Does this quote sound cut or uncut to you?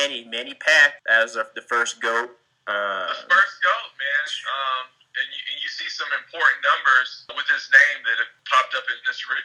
uncut